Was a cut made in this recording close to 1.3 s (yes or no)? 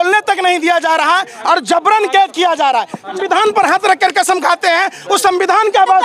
no